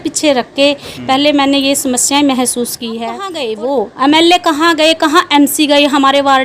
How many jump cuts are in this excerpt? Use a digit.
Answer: 1